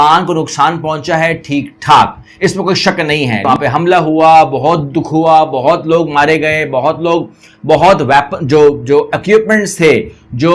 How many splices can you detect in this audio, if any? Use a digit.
1